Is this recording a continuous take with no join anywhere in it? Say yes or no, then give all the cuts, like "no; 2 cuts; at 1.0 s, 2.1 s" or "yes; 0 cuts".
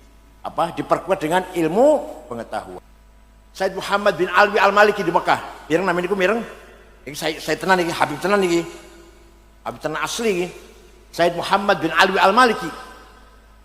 no; 1 cut; at 2.8 s